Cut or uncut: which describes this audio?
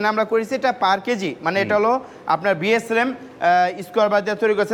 uncut